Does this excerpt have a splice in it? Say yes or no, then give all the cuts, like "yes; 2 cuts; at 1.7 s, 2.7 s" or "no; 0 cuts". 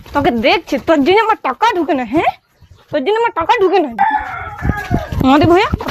yes; 1 cut; at 4.2 s